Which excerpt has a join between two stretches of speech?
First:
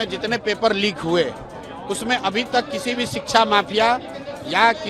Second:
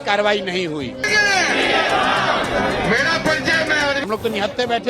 second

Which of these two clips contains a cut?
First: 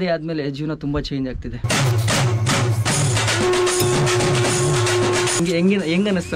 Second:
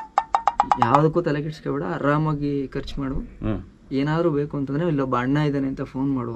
first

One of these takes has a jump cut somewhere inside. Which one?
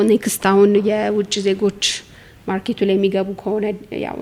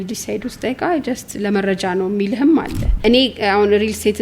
second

